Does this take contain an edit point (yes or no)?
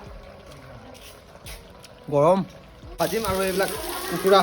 yes